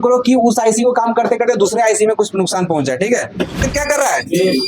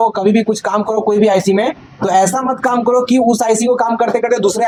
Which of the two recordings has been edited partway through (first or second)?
first